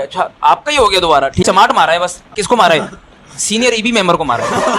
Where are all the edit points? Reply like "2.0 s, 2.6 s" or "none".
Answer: 1.4 s, 2.3 s